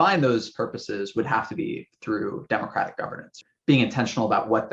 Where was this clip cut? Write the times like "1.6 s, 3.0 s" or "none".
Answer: 3.4 s

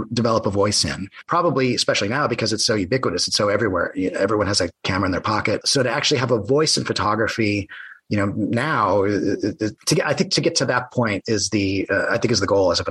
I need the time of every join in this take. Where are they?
1.2 s, 5.7 s, 9.8 s

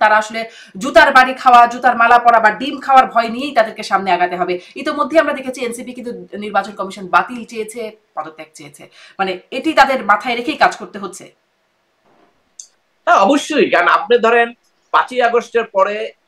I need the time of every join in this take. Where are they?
none

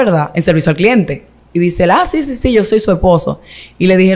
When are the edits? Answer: none

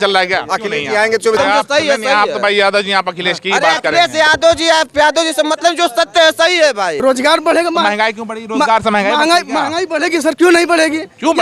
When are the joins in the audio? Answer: 1.4 s, 7.0 s

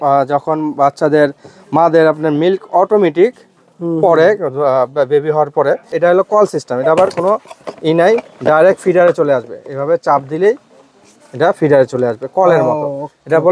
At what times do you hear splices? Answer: 5.9 s

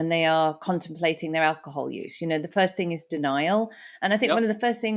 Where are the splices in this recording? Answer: none

